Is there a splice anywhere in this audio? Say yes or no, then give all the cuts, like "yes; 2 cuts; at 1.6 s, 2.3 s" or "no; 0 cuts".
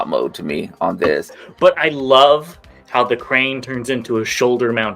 yes; 1 cut; at 1.4 s